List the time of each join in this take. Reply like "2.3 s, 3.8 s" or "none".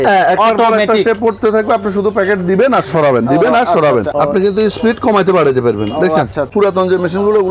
4.1 s, 6.5 s